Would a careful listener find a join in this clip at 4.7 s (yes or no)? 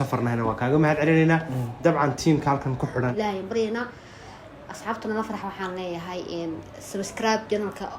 no